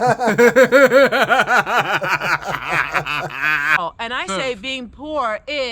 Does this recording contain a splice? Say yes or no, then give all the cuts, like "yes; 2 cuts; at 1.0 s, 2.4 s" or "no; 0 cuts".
yes; 1 cut; at 3.8 s